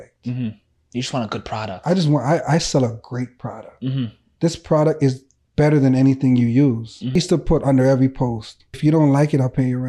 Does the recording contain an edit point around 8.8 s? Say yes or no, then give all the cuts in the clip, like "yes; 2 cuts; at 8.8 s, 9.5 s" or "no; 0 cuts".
yes; 2 cuts; at 7.2 s, 8.8 s